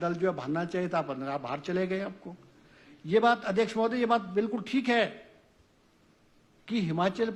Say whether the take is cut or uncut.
uncut